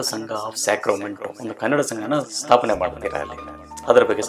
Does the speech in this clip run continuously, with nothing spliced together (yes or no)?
no